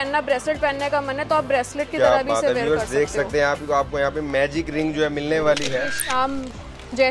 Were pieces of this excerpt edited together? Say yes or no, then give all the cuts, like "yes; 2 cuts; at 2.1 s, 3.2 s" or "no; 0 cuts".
yes; 1 cut; at 6.0 s